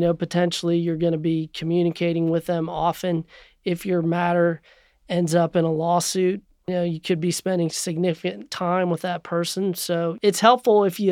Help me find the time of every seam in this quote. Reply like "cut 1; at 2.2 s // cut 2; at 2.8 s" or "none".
cut 1; at 6.7 s // cut 2; at 7.8 s // cut 3; at 10.2 s